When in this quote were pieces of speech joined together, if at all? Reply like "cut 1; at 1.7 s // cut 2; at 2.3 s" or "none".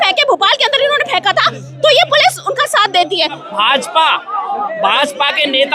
cut 1; at 3.4 s